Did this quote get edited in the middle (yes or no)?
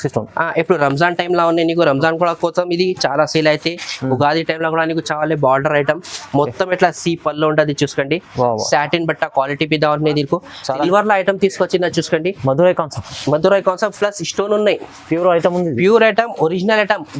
yes